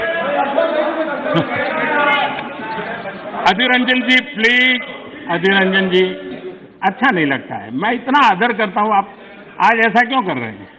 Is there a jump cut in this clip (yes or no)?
no